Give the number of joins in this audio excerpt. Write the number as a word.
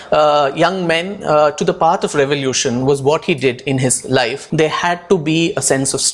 one